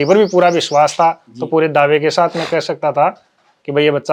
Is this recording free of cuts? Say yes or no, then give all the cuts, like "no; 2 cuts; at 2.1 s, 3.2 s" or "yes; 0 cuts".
yes; 0 cuts